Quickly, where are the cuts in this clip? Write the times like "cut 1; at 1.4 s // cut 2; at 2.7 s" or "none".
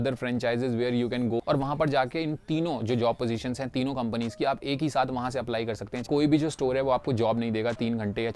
cut 1; at 1.4 s // cut 2; at 6.0 s